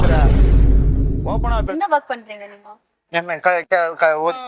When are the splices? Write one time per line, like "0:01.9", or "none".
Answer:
0:01.7

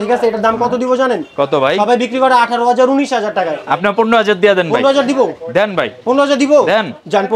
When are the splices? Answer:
none

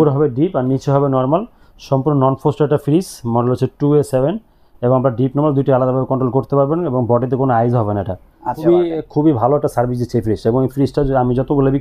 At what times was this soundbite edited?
0:08.6

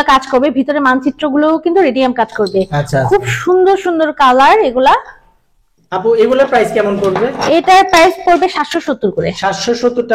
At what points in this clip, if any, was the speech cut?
none

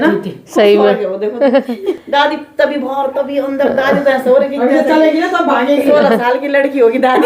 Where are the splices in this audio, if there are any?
0:01.9

